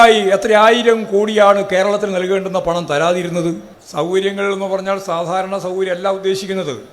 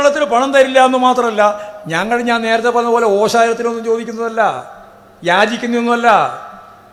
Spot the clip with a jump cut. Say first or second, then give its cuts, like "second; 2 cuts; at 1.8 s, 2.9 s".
first; 1 cut; at 3.8 s